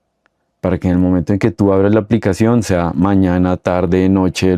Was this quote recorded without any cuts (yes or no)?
yes